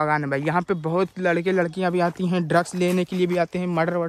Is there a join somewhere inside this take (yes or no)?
no